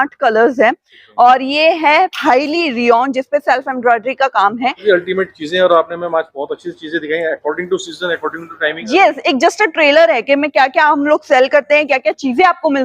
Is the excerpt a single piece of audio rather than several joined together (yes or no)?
no